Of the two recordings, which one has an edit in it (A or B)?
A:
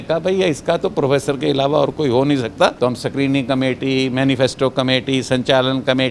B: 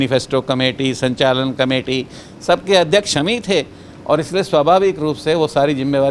A